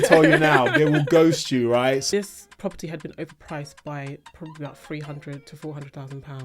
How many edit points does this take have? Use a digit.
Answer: 1